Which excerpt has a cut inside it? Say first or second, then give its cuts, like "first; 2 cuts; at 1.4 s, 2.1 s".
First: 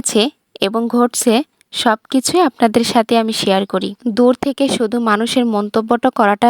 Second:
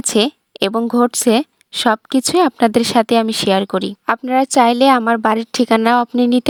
first; 1 cut; at 4.0 s